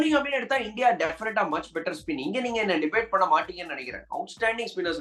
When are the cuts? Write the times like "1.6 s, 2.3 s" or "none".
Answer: none

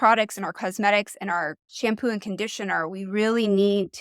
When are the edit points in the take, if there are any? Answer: 1.7 s

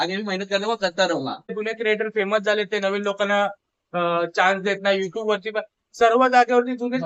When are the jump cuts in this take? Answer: 1.5 s

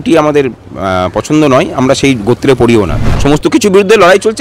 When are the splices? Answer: 3.0 s

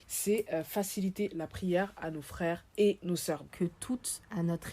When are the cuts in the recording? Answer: 3.5 s

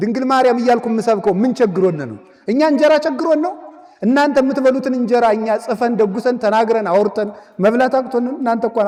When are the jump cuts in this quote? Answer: none

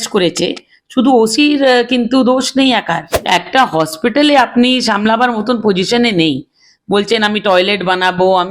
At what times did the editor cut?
3.1 s

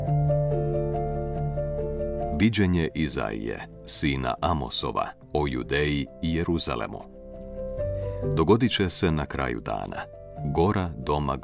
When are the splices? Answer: 2.3 s, 7.3 s, 8.4 s

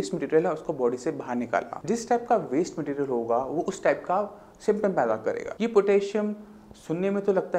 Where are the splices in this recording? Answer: 1.7 s, 5.5 s

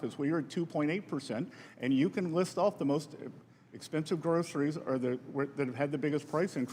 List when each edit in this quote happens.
none

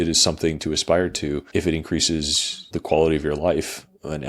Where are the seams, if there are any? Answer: 1.5 s, 2.6 s

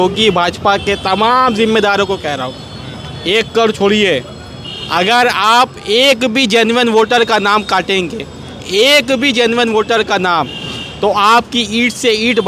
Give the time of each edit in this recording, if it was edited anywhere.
none

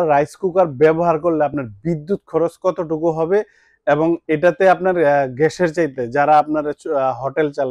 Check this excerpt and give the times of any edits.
none

